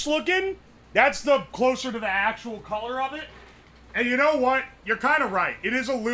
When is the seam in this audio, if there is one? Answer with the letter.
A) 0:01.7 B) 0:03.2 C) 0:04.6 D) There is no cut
D